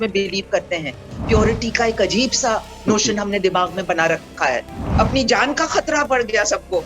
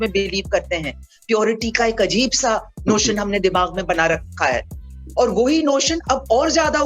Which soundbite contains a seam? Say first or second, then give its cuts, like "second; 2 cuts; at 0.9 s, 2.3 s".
first; 1 cut; at 4.8 s